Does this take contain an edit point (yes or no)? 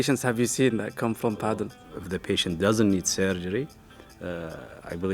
yes